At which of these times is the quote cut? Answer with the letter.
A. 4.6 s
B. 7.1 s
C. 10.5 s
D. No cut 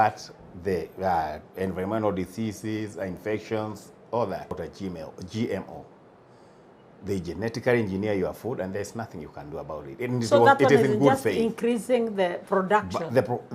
A